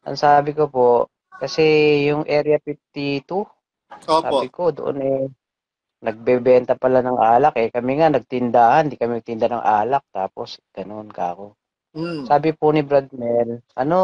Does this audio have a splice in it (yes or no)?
no